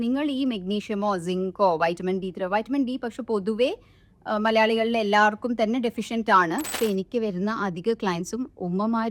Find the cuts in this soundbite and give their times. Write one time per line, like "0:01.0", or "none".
0:06.7